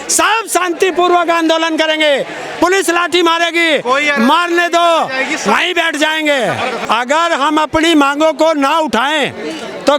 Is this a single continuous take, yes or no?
no